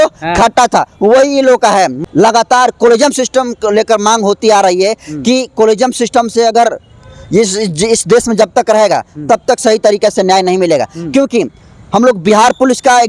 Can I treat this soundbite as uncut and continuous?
no; 1 cut; at 2.0 s

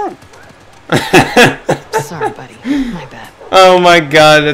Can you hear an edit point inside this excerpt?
no; 0 cuts

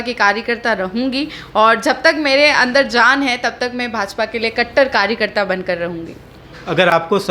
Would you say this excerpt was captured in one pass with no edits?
yes; 0 cuts

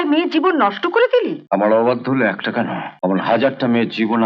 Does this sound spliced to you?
yes; 2 cuts; at 1.4 s, 2.8 s

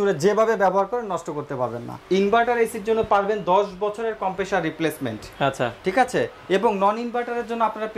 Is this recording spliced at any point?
yes; 1 cut; at 1.9 s

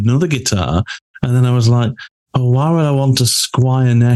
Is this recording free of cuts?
yes; 0 cuts

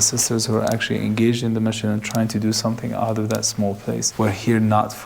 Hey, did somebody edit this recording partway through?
yes; 1 cut; at 4.1 s

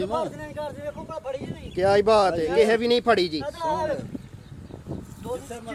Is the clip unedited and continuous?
yes; 0 cuts

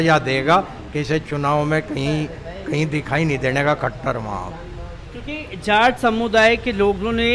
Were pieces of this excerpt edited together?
no; 0 cuts

